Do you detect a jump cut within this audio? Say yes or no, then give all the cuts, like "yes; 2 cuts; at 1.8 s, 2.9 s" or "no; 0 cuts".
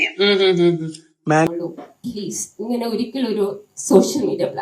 yes; 1 cut; at 1.5 s